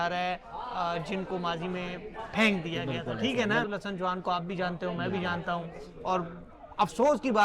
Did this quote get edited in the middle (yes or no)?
yes